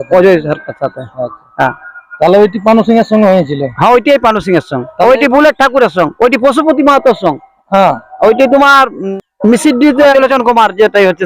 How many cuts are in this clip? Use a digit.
2